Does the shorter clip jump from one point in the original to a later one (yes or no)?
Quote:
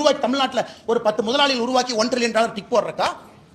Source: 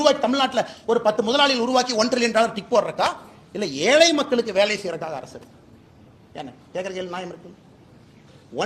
no